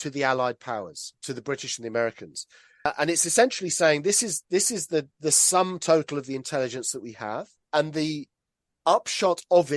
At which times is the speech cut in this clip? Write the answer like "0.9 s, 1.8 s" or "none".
2.9 s